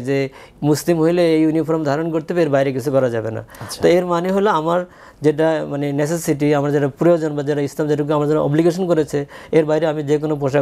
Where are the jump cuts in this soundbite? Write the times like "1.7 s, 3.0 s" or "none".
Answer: none